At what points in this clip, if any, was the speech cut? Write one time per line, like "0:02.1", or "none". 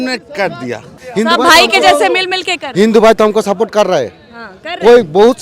0:01.0